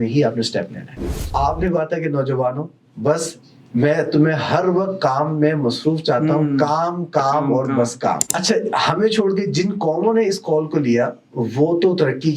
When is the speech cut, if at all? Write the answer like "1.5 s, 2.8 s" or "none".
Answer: 1.3 s, 8.3 s